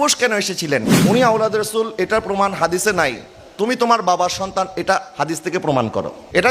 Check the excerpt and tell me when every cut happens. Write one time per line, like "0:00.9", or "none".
0:00.9